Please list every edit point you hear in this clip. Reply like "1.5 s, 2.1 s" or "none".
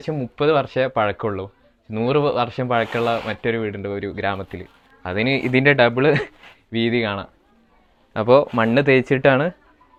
none

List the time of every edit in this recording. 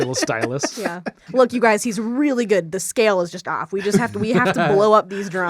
1.3 s

